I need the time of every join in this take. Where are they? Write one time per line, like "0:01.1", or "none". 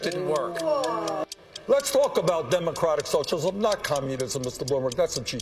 0:01.2